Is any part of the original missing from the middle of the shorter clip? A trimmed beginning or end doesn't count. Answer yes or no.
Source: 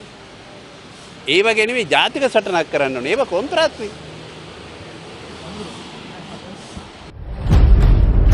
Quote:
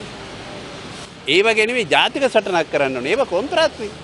no